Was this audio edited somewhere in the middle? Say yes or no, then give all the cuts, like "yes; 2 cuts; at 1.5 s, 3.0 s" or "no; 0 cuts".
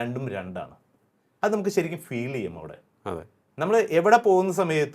no; 0 cuts